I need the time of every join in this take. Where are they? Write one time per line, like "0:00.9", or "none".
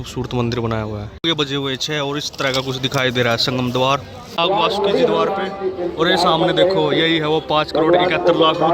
0:01.1
0:04.3